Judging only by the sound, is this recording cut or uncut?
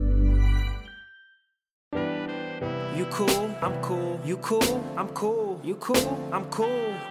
cut